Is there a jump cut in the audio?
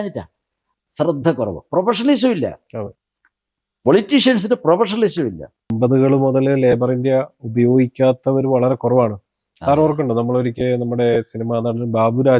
yes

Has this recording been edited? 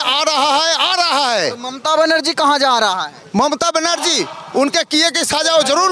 no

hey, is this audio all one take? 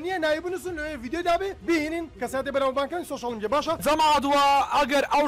no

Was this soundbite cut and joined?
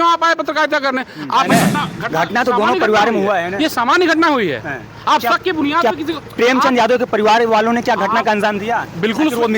yes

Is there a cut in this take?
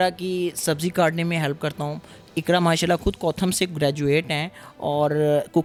no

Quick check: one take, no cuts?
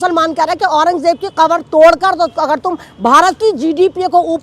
yes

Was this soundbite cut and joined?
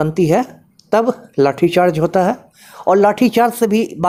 no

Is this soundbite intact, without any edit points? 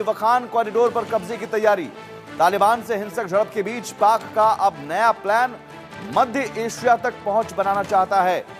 yes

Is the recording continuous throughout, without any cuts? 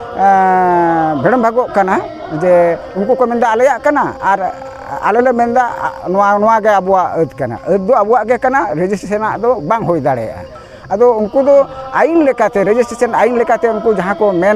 yes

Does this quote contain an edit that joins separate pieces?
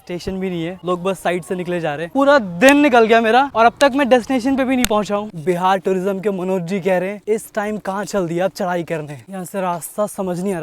yes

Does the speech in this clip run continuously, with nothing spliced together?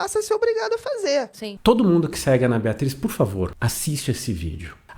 no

